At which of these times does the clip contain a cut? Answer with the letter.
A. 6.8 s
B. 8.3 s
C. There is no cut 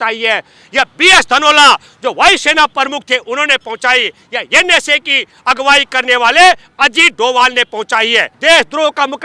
B